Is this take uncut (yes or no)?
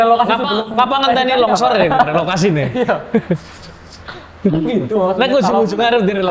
yes